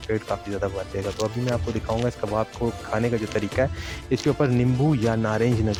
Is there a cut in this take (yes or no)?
no